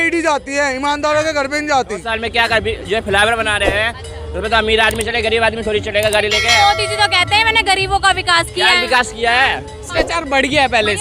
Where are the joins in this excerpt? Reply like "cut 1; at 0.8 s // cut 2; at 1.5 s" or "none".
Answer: cut 1; at 2.1 s // cut 2; at 9.9 s